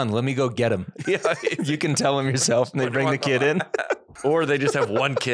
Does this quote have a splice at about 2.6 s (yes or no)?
no